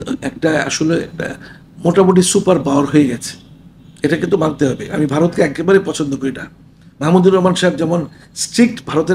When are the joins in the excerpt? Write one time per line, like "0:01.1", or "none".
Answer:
none

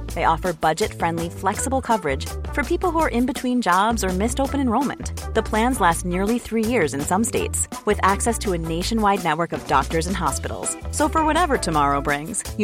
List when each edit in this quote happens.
none

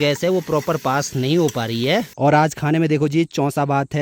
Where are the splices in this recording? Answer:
0:02.2

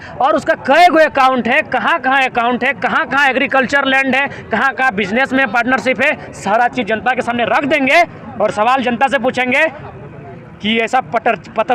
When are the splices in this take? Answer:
none

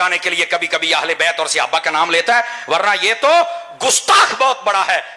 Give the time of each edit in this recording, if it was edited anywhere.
none

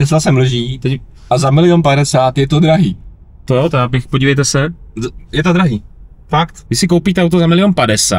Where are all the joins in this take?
0:06.6

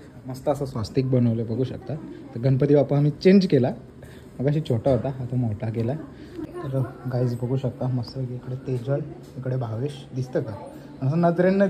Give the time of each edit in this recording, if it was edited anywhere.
0:06.4

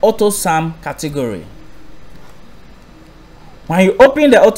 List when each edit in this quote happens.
none

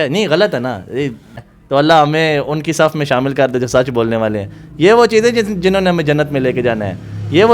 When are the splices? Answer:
0:01.3

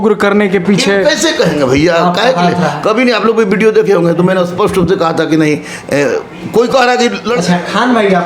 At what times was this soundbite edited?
0:07.3

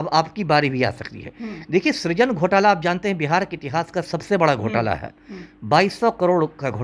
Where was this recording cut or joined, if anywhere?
none

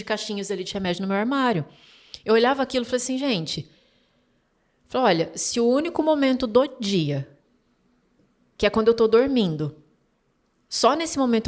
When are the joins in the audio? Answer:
none

